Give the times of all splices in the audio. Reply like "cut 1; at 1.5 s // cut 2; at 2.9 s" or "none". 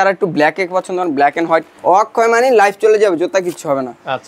cut 1; at 1.7 s